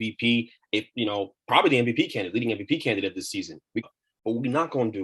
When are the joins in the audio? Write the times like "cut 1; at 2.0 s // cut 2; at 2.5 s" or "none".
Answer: cut 1; at 3.9 s